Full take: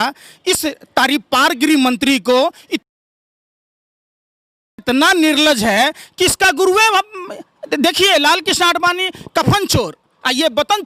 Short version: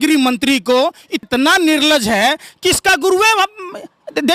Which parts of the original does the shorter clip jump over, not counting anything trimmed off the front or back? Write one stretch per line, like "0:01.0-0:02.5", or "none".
0:02.7-0:04.7